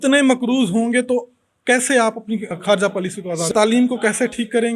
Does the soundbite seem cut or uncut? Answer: cut